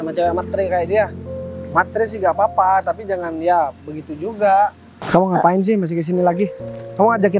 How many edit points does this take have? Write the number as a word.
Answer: one